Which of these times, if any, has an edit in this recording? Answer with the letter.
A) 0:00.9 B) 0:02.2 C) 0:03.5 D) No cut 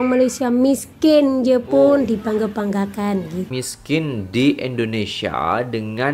C